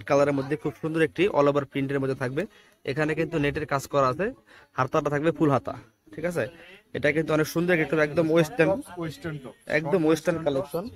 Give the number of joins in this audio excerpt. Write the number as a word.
zero